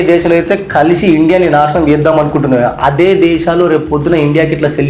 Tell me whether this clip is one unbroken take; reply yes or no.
yes